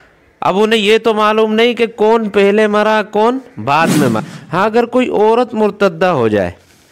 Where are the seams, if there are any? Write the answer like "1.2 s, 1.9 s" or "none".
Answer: 4.7 s